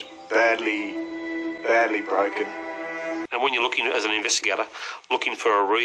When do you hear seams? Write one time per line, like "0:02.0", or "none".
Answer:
0:03.2